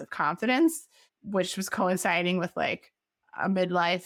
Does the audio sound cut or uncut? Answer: uncut